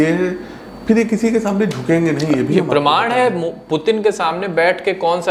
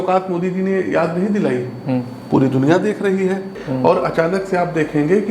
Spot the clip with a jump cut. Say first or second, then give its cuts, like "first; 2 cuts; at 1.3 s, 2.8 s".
second; 1 cut; at 3.6 s